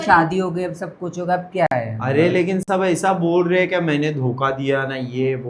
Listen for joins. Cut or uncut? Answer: uncut